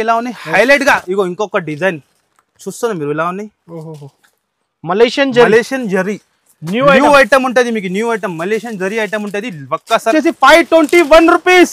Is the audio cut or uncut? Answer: cut